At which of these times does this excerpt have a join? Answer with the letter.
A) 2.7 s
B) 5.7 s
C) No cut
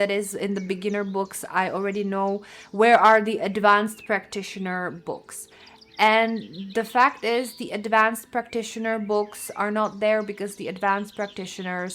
C